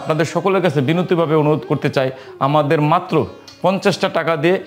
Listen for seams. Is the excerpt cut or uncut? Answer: uncut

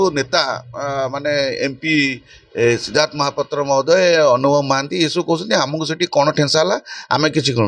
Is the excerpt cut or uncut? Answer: uncut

